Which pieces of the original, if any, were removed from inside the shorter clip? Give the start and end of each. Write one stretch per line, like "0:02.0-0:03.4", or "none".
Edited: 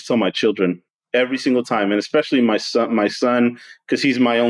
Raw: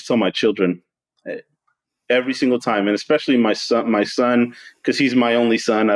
0:00.9-0:01.9